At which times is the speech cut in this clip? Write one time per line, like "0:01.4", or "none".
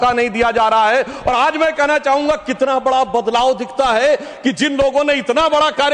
none